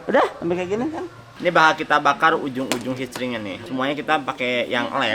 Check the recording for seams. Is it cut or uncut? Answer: cut